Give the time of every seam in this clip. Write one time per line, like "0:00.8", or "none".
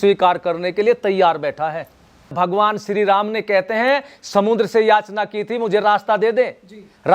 0:02.3